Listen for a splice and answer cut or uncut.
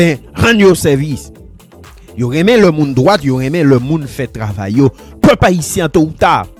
uncut